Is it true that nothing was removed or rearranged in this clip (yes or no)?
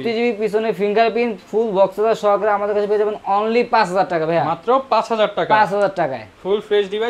yes